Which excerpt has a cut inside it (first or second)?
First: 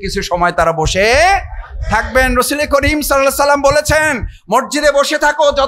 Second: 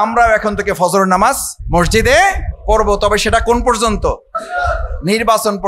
second